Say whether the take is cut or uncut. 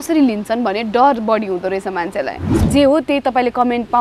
cut